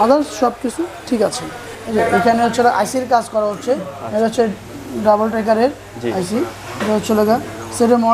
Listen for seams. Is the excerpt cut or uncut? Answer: cut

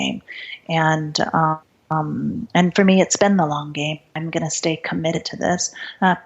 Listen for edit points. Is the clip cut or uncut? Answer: cut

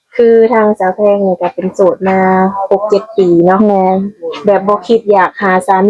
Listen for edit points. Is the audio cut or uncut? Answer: uncut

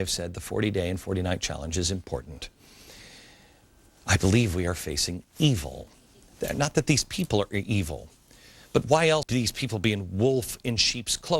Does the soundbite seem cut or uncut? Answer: cut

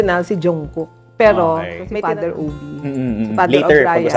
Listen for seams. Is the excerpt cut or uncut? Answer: cut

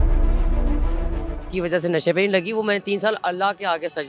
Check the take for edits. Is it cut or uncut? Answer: cut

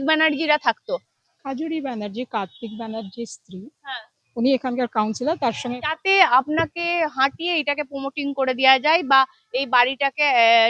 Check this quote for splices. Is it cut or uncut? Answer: cut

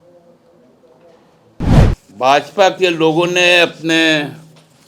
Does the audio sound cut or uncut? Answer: cut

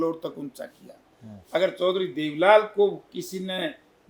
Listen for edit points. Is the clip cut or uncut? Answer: uncut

